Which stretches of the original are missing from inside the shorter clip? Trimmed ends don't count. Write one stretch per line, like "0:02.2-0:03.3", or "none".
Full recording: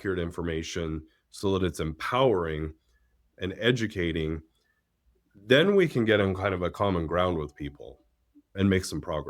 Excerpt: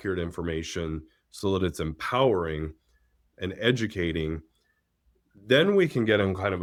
none